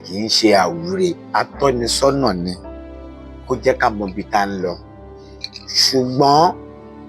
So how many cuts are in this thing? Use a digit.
1